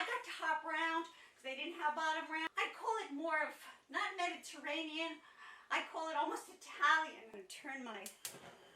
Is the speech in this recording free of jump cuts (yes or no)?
no